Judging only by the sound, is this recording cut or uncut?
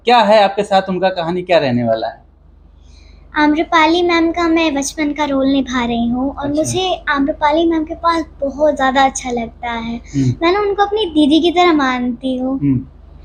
uncut